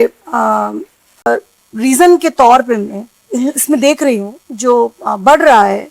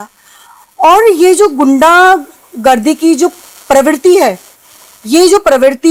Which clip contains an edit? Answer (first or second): first